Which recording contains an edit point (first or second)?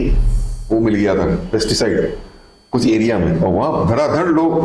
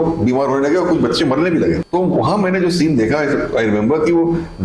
second